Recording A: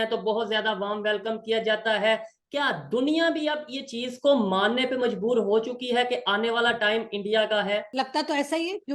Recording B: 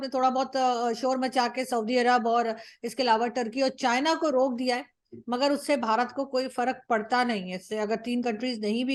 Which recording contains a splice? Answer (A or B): A